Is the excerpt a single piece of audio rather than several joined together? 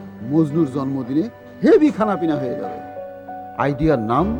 yes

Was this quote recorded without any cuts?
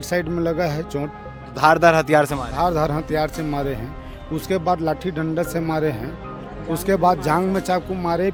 yes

